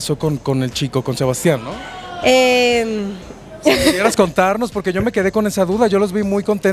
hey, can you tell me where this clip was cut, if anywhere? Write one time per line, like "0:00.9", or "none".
none